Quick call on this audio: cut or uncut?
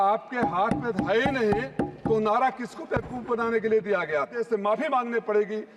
cut